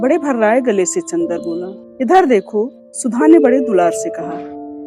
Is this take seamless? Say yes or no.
no